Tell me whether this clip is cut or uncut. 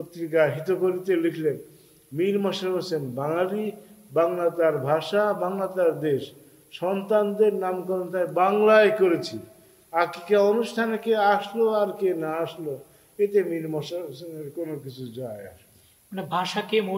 uncut